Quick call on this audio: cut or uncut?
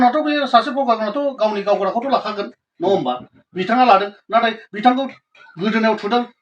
uncut